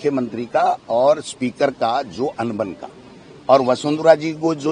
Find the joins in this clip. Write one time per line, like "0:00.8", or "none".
none